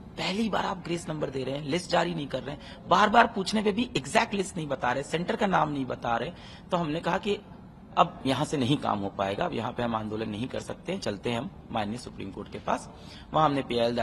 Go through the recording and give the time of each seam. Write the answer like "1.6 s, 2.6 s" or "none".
none